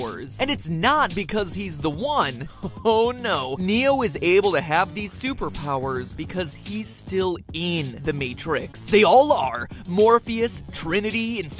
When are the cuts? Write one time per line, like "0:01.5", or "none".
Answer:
0:05.8